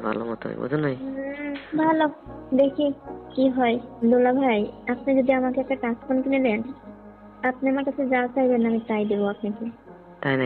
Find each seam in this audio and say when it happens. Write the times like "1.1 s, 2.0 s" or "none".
1.5 s, 3.9 s